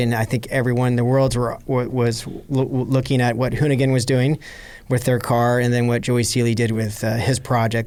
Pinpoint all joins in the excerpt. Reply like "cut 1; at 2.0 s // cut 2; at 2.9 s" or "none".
none